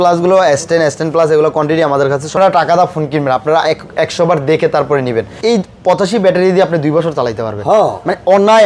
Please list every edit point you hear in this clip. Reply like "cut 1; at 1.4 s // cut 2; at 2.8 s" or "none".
cut 1; at 2.3 s // cut 2; at 5.4 s